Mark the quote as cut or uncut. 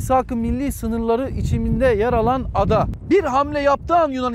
cut